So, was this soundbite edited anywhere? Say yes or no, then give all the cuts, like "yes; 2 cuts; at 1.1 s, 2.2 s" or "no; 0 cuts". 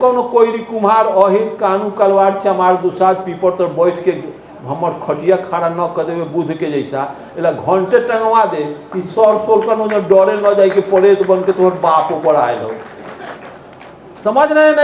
no; 0 cuts